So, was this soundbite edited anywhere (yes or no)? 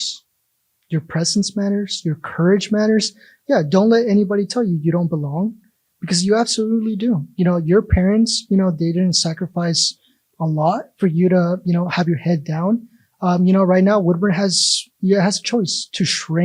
no